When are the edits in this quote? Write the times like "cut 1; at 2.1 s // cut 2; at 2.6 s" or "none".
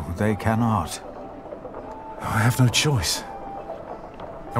cut 1; at 0.9 s // cut 2; at 2.3 s